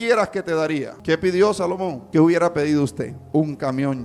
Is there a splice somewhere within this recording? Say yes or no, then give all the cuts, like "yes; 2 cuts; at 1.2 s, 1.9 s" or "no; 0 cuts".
yes; 3 cuts; at 0.9 s, 2.0 s, 3.2 s